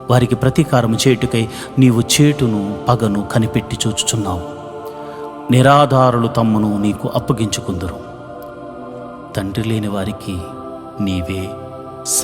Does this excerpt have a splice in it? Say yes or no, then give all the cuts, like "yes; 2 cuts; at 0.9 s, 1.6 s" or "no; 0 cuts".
yes; 2 cuts; at 7.9 s, 9.3 s